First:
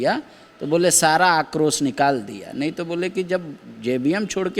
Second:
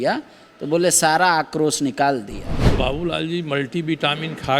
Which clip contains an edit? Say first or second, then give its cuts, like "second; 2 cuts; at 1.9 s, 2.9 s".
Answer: second; 1 cut; at 2.4 s